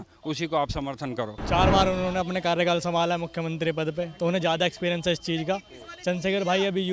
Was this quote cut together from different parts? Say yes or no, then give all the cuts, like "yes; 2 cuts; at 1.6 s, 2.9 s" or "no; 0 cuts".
yes; 1 cut; at 1.4 s